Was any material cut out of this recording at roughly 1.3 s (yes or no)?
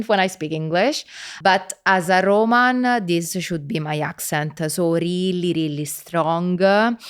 yes